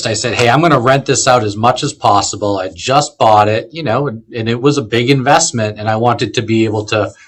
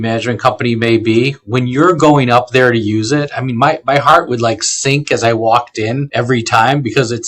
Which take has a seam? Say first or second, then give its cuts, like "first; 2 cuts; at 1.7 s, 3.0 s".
second; 1 cut; at 6.0 s